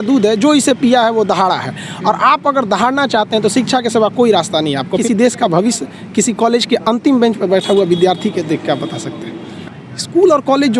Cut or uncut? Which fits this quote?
cut